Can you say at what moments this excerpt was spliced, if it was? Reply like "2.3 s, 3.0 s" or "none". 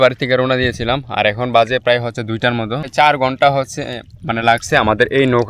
2.9 s